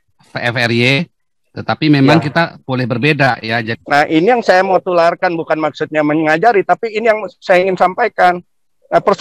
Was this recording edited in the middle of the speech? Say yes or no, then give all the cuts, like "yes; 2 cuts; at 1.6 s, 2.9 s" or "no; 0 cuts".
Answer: yes; 1 cut; at 3.7 s